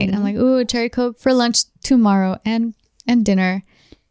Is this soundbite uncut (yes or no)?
no